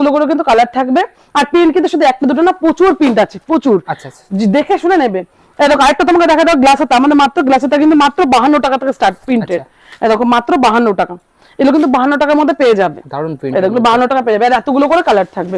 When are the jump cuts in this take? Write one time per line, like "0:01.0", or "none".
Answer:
none